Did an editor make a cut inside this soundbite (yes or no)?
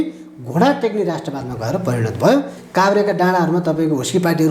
yes